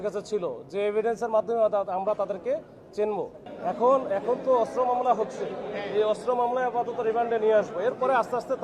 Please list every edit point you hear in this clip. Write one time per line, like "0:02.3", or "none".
0:03.4

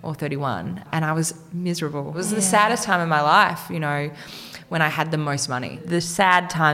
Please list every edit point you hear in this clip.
0:02.2
0:05.8

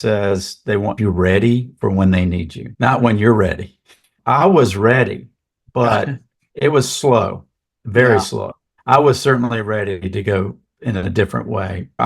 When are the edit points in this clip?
0:01.0
0:06.4

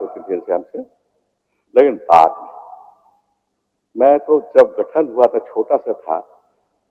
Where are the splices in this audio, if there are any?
none

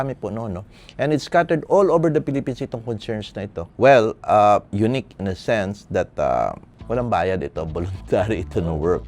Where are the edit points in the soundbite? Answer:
0:03.7
0:06.7

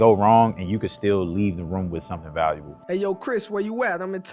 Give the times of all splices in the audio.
0:02.7

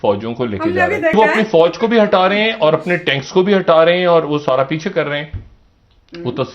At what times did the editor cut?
0:01.1

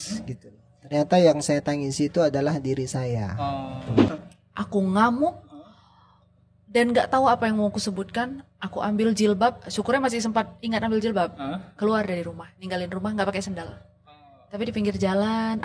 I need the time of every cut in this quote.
0:04.0

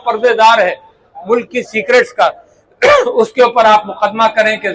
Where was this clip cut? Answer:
none

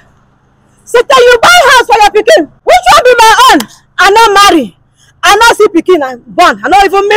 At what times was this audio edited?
0:02.5

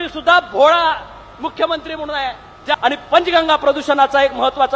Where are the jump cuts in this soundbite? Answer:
0:02.7

